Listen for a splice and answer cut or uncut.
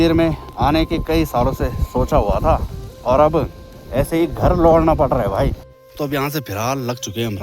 cut